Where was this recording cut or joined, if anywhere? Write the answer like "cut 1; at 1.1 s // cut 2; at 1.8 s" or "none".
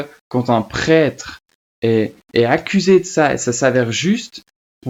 none

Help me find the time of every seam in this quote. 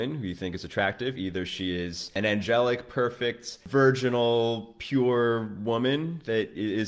cut 1; at 2.1 s // cut 2; at 3.6 s

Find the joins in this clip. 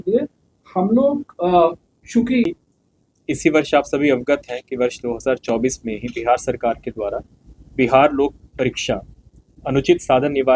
cut 1; at 2.4 s

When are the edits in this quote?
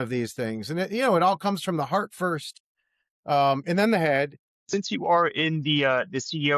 cut 1; at 4.6 s

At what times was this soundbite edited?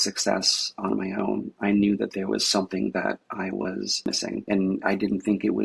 none

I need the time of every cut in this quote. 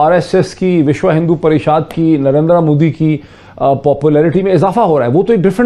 none

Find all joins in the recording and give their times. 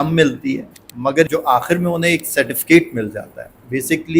cut 1; at 1.3 s

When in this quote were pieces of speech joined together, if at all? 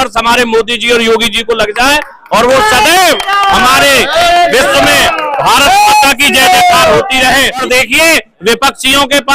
cut 1; at 7.6 s

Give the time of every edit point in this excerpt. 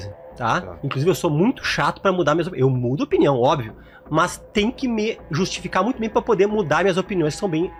none

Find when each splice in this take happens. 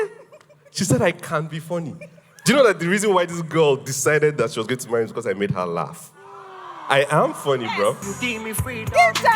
cut 1; at 8.1 s

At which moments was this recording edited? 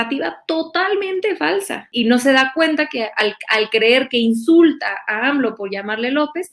cut 1; at 1.9 s

